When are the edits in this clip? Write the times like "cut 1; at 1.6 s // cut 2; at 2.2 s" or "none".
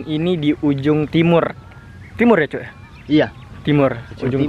none